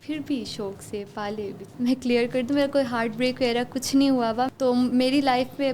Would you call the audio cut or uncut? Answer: cut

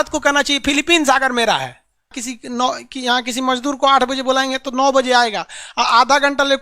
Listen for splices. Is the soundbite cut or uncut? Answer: cut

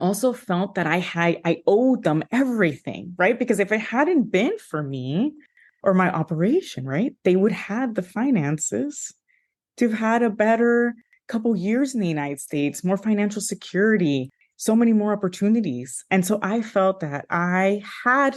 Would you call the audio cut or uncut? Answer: uncut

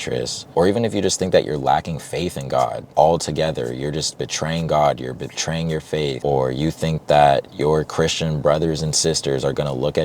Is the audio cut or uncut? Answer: cut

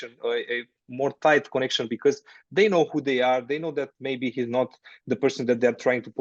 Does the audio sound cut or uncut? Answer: uncut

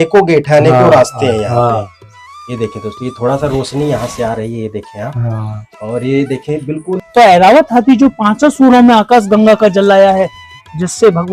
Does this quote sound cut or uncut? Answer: cut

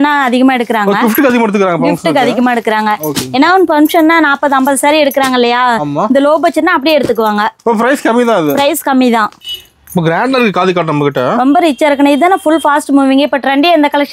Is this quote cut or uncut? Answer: cut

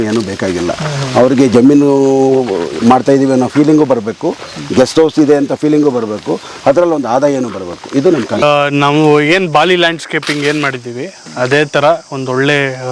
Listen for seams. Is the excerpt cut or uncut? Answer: cut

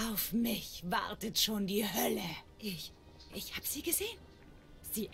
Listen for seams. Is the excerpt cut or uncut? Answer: uncut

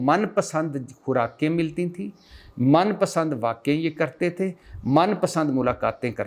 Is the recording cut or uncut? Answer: uncut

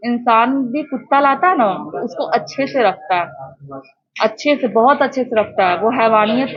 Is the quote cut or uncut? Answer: uncut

